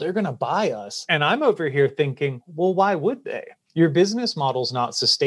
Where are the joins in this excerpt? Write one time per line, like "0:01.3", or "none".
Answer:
0:00.9